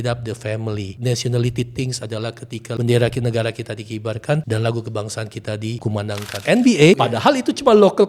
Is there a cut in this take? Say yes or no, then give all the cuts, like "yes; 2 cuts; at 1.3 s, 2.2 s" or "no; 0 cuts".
yes; 5 cuts; at 0.9 s, 2.8 s, 4.4 s, 6.0 s, 7.0 s